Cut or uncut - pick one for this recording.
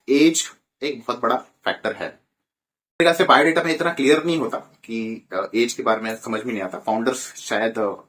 cut